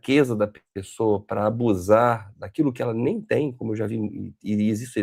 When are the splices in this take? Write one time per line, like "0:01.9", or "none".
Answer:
none